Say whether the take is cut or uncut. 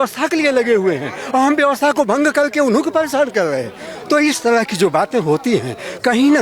uncut